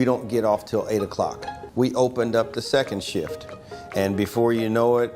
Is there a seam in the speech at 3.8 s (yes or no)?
no